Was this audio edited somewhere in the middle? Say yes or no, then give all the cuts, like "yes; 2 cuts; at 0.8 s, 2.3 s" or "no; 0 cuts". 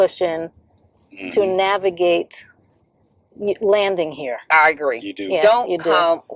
no; 0 cuts